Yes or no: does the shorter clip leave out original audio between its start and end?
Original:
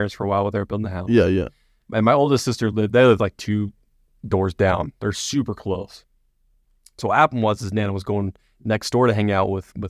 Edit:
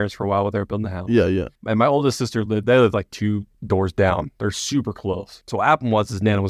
yes